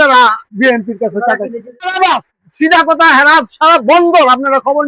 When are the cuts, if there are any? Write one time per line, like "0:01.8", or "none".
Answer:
0:01.9

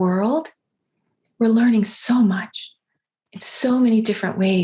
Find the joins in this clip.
none

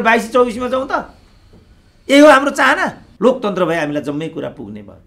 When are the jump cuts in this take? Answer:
0:03.0

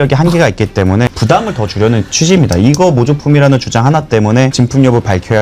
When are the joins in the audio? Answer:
0:01.1
0:04.5

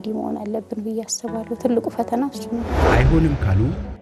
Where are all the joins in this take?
0:02.8

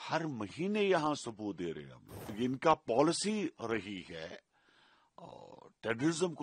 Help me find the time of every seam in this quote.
0:02.2

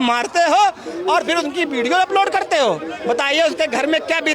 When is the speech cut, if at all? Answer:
none

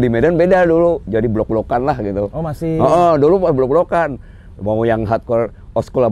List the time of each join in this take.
none

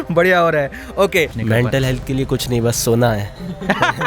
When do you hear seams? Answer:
0:01.3

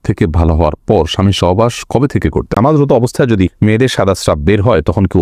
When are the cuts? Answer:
0:02.6
0:03.5

